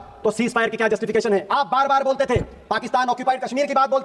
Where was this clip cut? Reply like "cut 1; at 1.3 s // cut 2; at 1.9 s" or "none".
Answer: cut 1; at 1.5 s